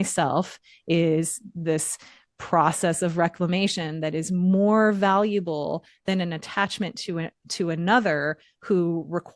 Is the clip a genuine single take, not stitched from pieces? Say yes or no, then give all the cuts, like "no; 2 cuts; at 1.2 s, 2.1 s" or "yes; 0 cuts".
yes; 0 cuts